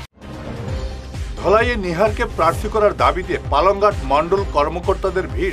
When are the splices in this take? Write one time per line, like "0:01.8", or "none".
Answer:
0:00.9